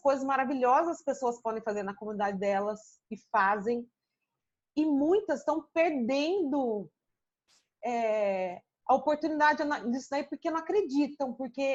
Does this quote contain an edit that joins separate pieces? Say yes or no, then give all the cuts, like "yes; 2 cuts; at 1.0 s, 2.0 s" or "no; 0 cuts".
no; 0 cuts